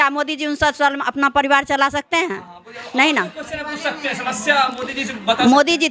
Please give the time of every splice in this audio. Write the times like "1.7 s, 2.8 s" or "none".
none